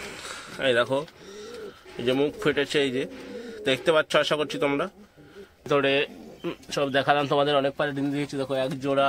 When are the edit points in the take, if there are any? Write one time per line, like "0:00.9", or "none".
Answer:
0:05.7